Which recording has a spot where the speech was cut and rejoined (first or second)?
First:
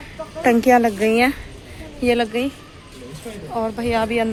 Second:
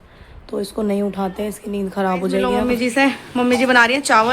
second